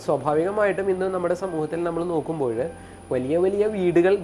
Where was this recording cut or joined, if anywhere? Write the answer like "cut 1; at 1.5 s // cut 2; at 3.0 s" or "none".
none